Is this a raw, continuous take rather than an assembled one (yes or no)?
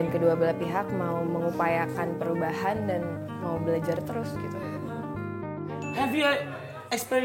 no